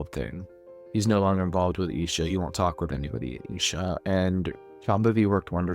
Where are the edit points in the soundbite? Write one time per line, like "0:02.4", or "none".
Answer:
0:04.6